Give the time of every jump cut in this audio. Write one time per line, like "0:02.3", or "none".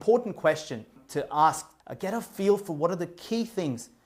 0:01.0
0:01.7